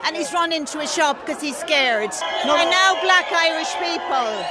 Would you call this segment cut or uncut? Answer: cut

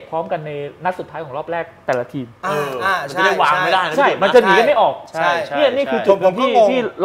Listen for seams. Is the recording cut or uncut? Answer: uncut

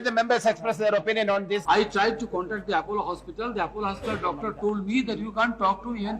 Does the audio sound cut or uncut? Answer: cut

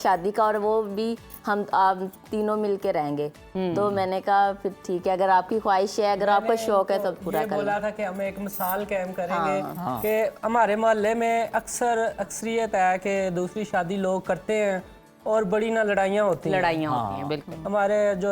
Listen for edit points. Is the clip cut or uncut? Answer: uncut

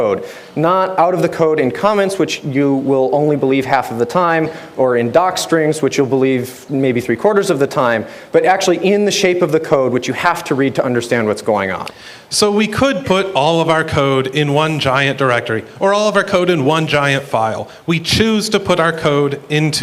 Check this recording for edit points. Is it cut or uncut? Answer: cut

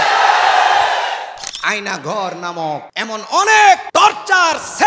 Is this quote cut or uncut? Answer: cut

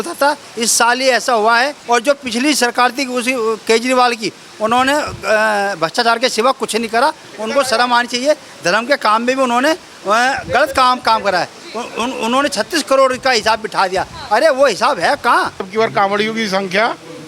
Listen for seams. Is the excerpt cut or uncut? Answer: cut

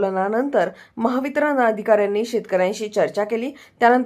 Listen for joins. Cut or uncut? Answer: cut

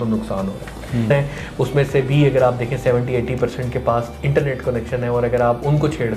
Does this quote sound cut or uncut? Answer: cut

